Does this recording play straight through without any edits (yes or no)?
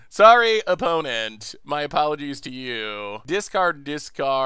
no